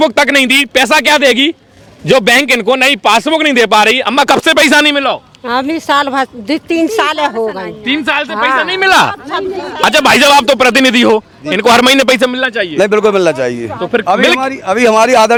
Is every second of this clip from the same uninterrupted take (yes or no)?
yes